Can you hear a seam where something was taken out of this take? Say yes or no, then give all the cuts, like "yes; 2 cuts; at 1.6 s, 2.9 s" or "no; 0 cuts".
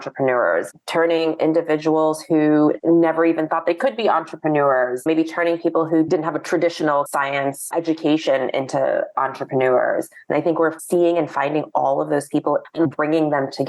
yes; 1 cut; at 12.7 s